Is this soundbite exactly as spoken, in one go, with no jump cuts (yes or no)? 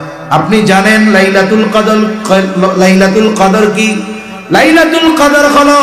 yes